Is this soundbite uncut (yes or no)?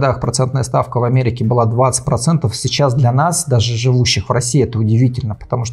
yes